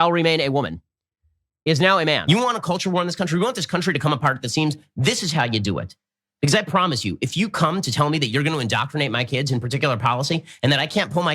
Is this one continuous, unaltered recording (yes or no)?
no